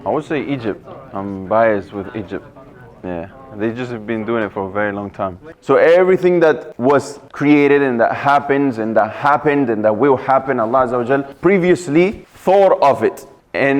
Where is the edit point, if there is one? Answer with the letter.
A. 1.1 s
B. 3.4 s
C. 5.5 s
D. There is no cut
C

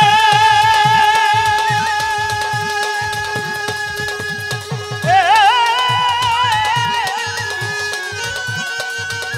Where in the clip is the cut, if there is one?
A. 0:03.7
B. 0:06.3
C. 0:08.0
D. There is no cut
D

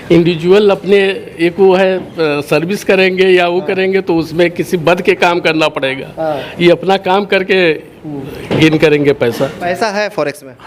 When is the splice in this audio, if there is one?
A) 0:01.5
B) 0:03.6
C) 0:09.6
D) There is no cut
C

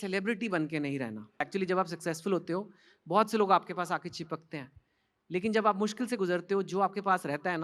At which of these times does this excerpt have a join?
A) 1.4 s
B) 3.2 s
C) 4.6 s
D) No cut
A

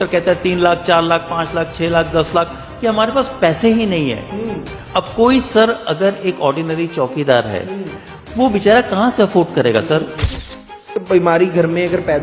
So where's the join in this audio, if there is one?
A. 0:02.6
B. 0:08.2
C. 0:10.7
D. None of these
C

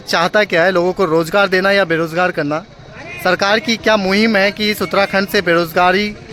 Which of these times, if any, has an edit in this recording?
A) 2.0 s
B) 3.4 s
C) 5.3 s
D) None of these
D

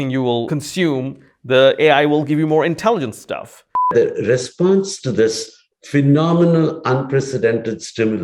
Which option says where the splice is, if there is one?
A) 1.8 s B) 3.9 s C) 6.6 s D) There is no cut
B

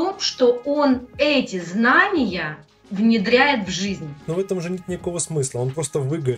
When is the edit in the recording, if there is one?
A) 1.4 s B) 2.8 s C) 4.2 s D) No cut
C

